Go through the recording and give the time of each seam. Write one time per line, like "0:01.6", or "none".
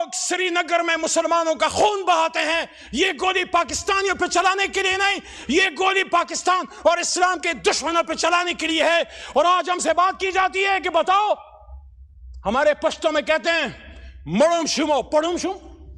none